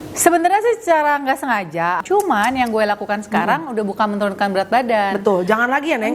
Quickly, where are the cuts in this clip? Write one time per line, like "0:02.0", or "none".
0:02.0